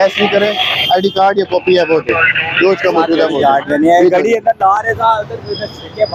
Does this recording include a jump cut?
no; 0 cuts

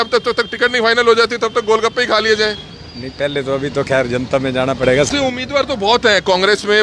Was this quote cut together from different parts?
yes; 1 cut; at 5.1 s

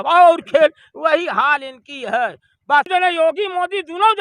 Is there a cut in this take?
yes; 1 cut; at 2.9 s

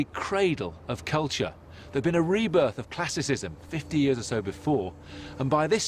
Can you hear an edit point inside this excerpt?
yes; 1 cut; at 3.0 s

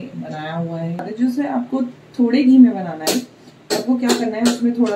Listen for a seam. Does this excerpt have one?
yes; 1 cut; at 1.0 s

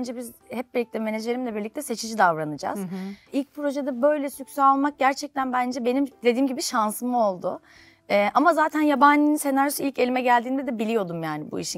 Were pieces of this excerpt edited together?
no; 0 cuts

